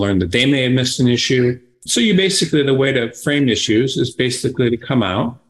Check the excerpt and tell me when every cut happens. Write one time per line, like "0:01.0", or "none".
0:01.9

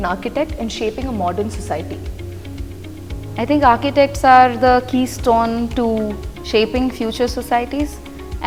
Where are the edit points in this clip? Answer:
none

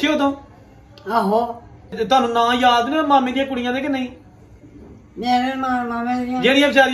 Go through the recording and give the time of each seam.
0:01.9

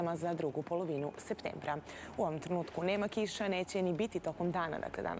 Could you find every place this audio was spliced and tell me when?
0:03.3

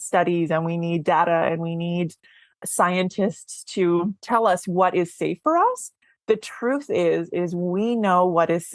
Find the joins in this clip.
0:04.2

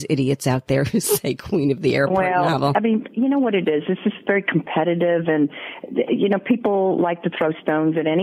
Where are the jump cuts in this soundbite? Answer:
0:02.7

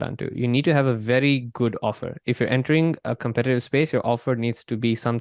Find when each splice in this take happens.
none

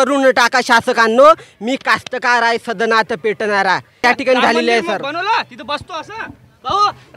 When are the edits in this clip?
0:04.0

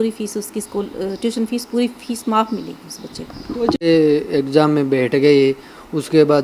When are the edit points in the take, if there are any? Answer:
0:03.8

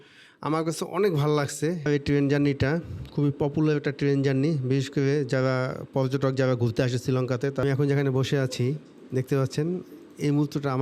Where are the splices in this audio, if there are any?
0:01.9
0:07.6

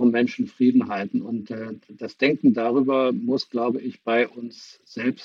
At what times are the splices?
none

